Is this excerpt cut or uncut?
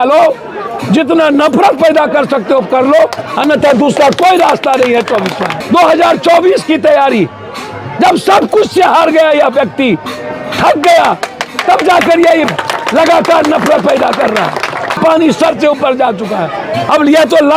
cut